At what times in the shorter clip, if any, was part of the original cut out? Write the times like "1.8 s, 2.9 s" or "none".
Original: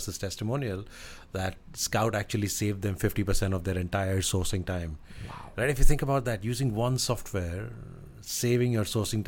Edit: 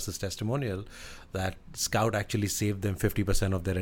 none